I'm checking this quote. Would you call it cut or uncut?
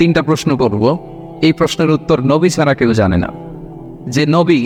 uncut